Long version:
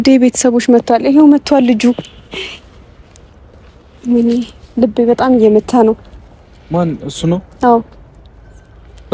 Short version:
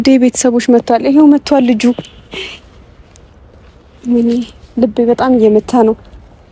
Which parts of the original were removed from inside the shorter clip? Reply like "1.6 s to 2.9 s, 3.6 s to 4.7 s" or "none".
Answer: none